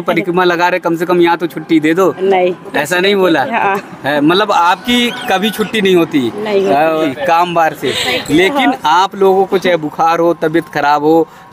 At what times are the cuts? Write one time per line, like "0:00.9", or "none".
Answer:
0:07.1